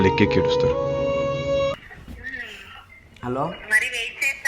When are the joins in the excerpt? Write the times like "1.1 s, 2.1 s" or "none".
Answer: 1.7 s

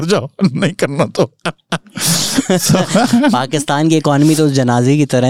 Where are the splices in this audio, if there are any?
none

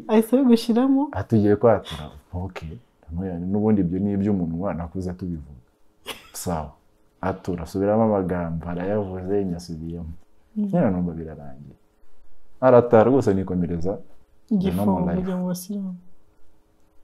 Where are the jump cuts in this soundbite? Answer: none

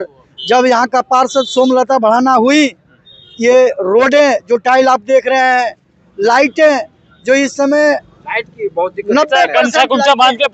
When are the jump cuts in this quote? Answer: none

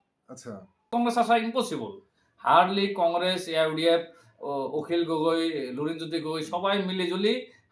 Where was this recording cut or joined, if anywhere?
0.9 s

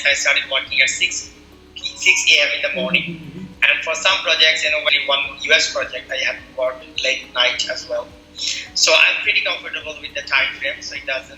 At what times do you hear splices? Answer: none

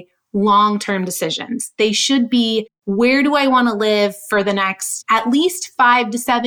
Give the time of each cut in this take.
2.8 s, 4.9 s

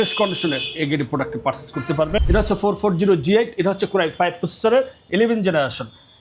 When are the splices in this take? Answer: 2.2 s

